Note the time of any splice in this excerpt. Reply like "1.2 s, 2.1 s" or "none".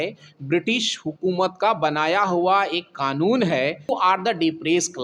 3.9 s